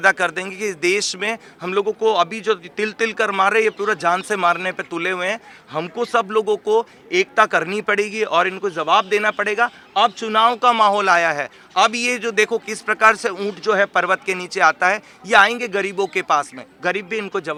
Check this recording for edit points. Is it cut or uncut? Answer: uncut